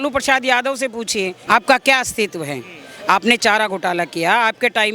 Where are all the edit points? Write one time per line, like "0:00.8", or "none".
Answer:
0:01.4